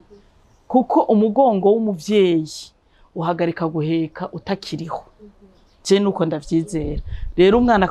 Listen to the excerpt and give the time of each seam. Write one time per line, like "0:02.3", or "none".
none